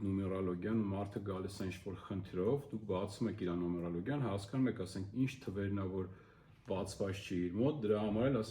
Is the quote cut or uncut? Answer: uncut